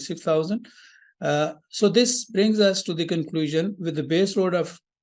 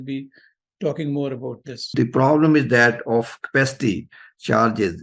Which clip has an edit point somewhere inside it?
second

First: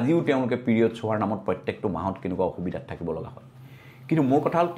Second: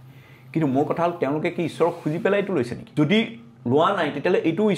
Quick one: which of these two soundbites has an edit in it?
second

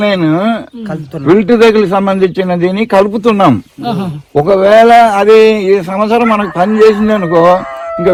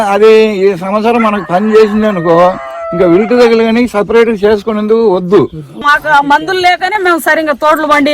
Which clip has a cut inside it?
second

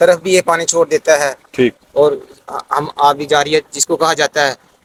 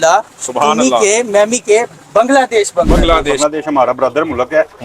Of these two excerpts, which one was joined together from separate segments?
second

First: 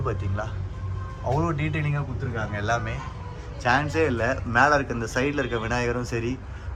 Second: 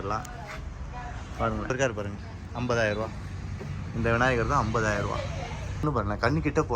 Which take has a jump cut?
second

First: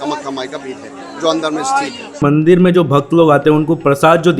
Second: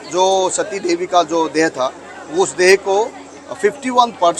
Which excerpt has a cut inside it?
first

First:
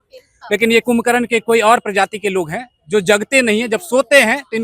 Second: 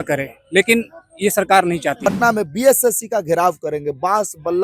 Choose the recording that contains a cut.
second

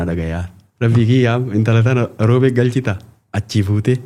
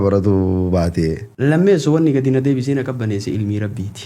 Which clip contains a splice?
second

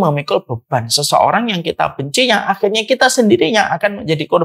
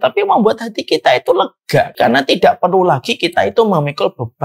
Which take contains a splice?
second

